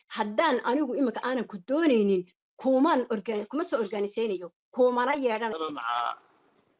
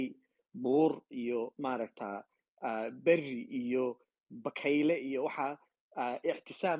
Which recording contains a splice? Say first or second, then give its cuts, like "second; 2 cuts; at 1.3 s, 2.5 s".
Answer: first; 1 cut; at 5.5 s